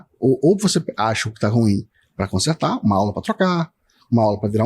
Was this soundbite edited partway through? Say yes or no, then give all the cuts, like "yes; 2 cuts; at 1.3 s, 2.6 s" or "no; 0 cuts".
no; 0 cuts